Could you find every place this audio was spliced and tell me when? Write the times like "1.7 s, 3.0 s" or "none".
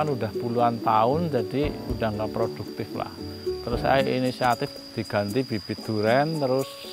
4.8 s